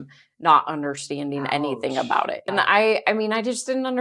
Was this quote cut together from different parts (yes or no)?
yes